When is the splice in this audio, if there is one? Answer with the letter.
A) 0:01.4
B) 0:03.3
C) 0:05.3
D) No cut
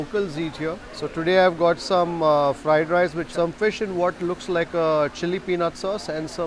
B